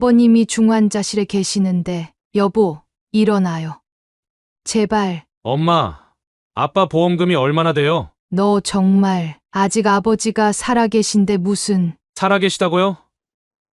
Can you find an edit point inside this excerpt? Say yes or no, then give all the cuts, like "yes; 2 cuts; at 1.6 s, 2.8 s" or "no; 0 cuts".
yes; 2 cuts; at 2.1 s, 5.3 s